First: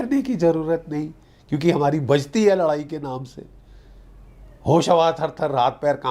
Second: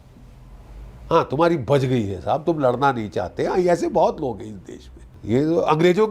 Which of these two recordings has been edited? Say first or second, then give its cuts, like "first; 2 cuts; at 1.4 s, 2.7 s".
second; 1 cut; at 5.1 s